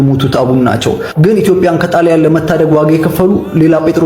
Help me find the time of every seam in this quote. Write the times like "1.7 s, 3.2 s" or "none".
none